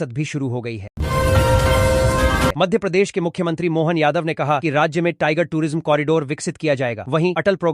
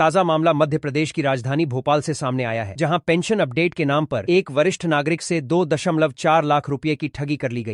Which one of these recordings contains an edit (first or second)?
first